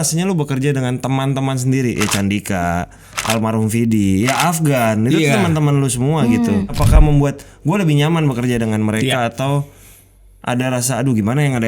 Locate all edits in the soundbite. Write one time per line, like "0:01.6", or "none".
0:06.8